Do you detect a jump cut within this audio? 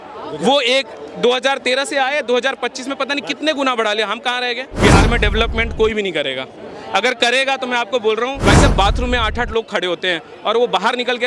yes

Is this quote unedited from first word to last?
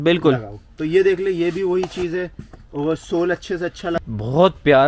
no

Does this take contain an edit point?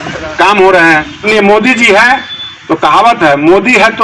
yes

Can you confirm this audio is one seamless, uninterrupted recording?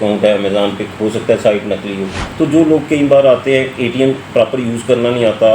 no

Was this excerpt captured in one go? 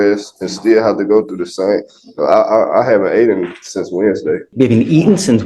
no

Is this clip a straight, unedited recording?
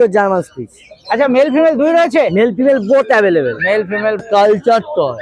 no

